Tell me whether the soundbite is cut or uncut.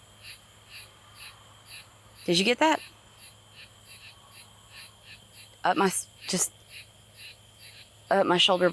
uncut